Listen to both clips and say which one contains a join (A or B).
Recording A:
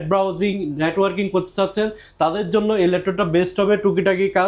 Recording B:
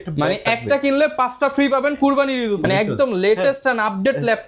B